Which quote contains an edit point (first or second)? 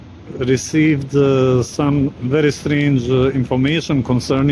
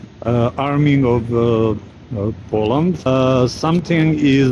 second